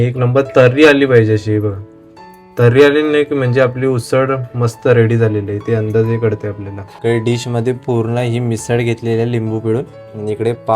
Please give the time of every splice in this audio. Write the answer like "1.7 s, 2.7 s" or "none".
7.0 s